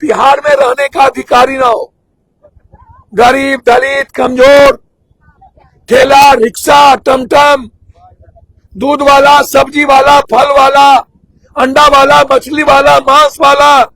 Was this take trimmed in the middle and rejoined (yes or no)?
no